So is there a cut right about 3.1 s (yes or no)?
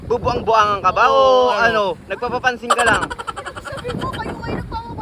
no